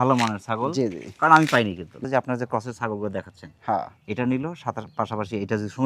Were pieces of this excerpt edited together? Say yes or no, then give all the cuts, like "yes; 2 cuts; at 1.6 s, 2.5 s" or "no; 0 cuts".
yes; 1 cut; at 2.0 s